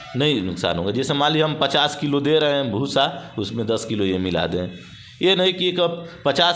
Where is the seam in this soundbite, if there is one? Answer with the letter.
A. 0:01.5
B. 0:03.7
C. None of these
C